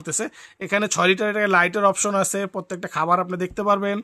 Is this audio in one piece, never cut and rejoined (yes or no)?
yes